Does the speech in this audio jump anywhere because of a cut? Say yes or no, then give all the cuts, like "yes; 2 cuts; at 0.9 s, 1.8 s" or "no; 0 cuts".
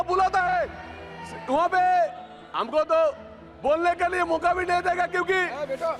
no; 0 cuts